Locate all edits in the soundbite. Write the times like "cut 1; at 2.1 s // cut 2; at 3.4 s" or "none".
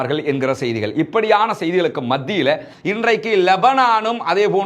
cut 1; at 2.7 s